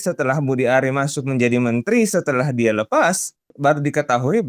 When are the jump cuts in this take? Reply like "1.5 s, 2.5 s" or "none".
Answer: 3.5 s